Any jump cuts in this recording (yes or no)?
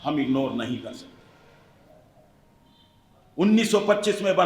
no